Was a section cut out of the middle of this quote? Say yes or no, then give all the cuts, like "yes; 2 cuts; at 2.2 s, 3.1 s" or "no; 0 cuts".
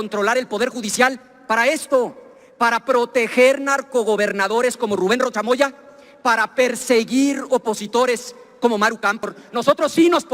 yes; 1 cut; at 9.4 s